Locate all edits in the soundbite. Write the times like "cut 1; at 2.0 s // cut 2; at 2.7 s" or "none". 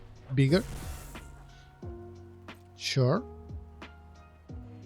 cut 1; at 1.2 s // cut 2; at 2.8 s // cut 3; at 3.7 s